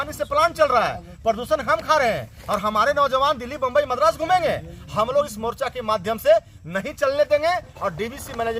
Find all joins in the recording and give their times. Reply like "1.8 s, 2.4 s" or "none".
none

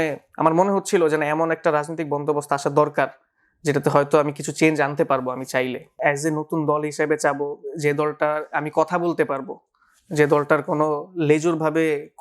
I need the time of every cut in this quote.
6.0 s

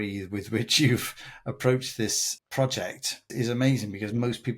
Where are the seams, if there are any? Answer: 2.2 s, 3.3 s

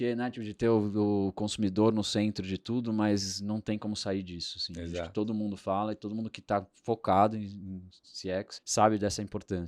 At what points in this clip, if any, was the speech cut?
8.6 s

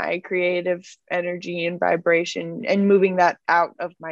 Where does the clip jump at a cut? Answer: 2.6 s

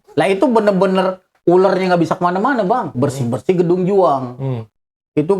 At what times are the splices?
2.9 s

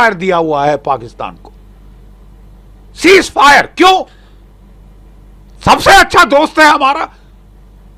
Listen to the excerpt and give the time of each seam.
none

